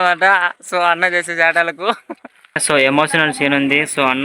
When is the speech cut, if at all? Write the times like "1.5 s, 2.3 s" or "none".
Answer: 2.6 s

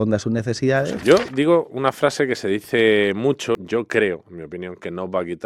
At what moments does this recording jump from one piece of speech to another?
1.0 s, 3.6 s

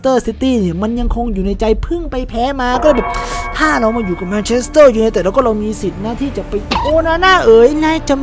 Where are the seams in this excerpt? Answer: 6.7 s

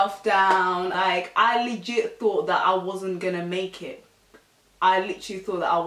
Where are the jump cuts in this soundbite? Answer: 0.9 s

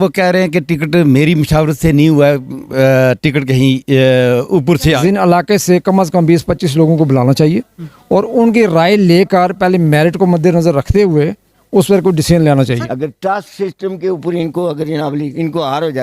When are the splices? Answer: 5.0 s, 12.8 s

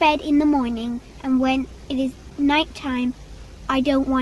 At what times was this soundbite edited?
none

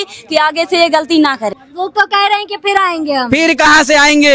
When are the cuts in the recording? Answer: 1.5 s

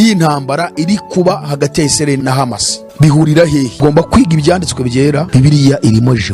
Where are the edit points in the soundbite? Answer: 2.2 s, 3.7 s, 5.3 s

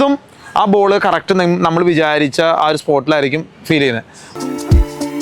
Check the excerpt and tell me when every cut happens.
4.2 s

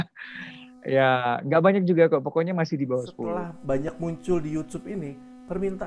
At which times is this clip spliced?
3.9 s

